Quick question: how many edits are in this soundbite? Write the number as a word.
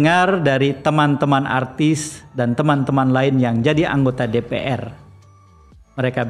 zero